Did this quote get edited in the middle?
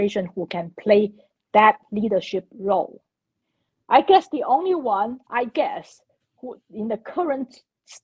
no; 0 cuts

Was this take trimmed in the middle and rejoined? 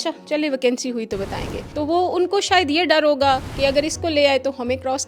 yes; 2 cuts; at 1.6 s, 3.5 s

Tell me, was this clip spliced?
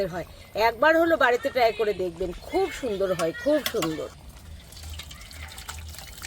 yes; 1 cut; at 4.1 s

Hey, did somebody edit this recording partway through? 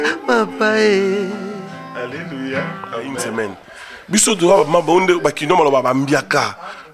yes; 1 cut; at 3.3 s

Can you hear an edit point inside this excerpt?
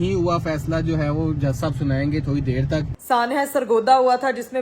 yes; 1 cut; at 3.0 s

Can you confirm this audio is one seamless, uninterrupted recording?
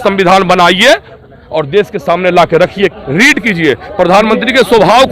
no; 1 cut; at 3.0 s

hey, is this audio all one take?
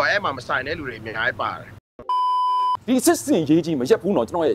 no; 1 cut; at 2.3 s

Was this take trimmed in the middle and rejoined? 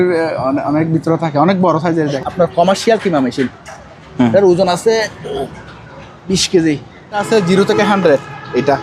yes; 2 cuts; at 2.2 s, 7.2 s

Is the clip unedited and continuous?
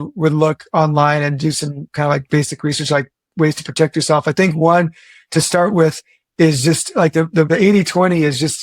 no; 1 cut; at 7.5 s

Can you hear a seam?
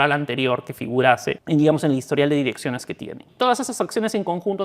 yes; 2 cuts; at 1.4 s, 3.2 s

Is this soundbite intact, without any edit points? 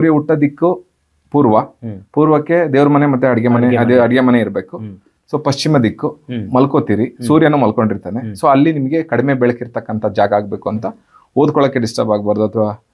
yes; 0 cuts

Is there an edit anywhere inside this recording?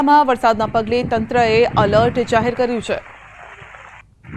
no; 0 cuts

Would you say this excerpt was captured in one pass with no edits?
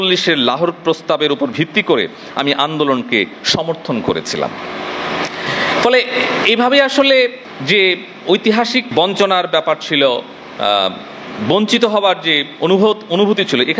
yes; 0 cuts

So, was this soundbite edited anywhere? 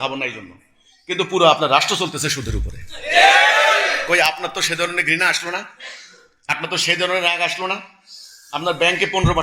no; 0 cuts

